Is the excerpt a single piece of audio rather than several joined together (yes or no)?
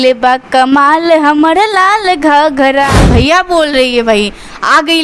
no